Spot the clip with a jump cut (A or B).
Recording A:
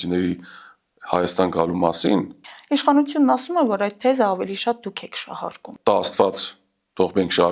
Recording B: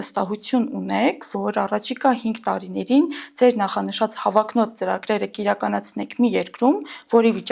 A